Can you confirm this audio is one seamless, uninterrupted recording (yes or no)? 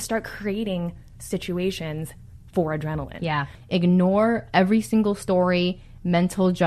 no